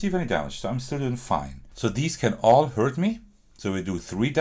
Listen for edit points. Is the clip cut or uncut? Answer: cut